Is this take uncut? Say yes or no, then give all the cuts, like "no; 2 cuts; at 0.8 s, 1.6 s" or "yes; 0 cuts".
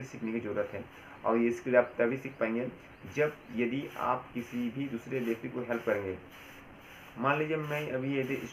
yes; 0 cuts